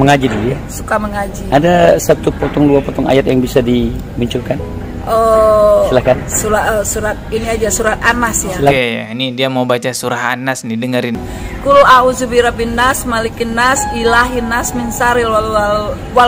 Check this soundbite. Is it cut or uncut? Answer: cut